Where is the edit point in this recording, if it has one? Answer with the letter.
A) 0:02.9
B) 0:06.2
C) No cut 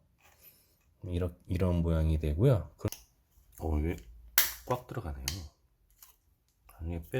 A